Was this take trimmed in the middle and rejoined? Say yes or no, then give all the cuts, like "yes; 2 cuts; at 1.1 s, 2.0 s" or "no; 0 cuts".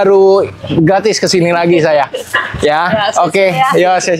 no; 0 cuts